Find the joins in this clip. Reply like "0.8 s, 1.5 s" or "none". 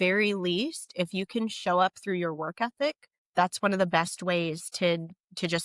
3.1 s